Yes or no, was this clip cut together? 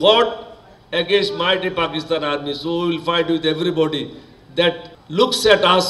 yes